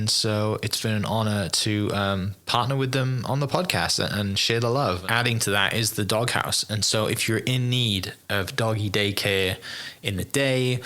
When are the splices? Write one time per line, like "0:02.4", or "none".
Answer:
0:05.0

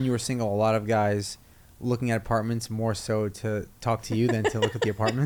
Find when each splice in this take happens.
none

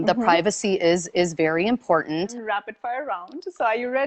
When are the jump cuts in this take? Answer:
0:02.3

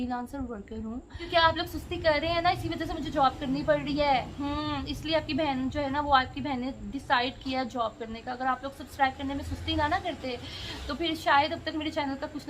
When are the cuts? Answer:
0:01.2

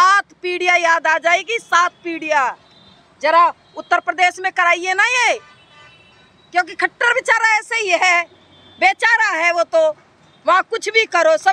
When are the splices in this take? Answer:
none

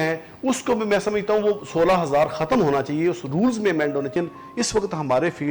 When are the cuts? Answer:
0:04.1

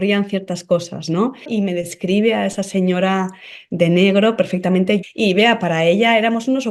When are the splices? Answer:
0:01.5
0:05.0

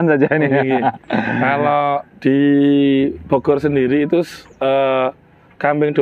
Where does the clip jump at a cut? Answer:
none

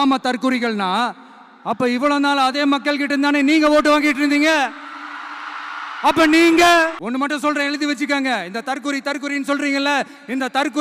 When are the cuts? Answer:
0:07.0

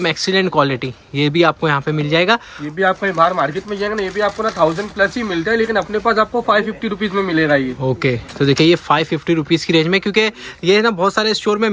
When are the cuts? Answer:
none

